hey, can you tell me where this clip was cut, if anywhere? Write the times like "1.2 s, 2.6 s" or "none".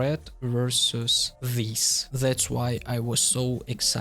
1.8 s